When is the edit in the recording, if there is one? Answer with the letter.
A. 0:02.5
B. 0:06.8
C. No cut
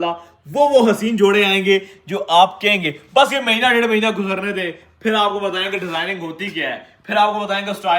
C